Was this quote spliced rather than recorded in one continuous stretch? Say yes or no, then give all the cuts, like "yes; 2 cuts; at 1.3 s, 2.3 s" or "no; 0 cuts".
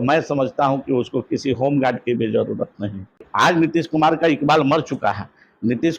yes; 1 cut; at 3.2 s